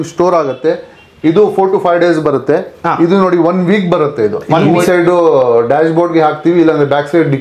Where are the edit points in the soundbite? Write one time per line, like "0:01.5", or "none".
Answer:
0:04.7